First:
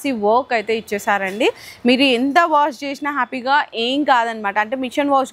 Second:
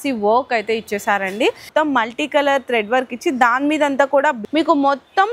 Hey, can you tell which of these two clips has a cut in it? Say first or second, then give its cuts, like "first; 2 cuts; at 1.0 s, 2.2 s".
second; 2 cuts; at 1.6 s, 4.4 s